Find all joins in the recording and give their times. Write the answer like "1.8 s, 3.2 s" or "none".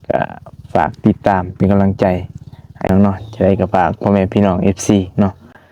2.9 s